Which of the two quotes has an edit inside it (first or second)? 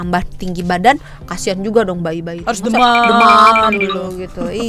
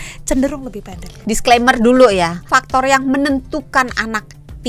second